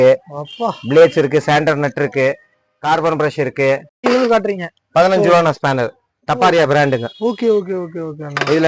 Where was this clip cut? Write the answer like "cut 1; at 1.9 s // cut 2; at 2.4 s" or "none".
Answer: cut 1; at 4.0 s